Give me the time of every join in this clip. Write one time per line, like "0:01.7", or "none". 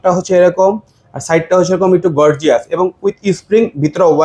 none

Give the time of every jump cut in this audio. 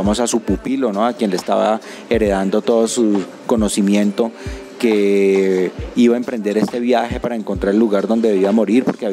none

